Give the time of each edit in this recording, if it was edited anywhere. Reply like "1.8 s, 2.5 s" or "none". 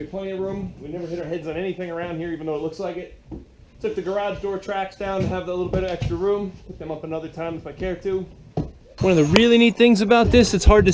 8.9 s

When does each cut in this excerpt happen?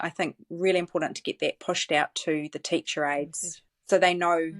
1.6 s

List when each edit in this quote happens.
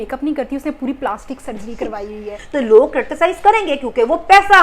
2.4 s

